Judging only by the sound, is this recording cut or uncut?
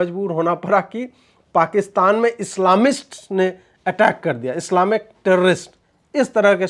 uncut